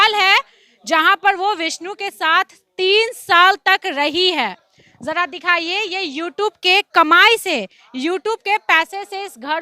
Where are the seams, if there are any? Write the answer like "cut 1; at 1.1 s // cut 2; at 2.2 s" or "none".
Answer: none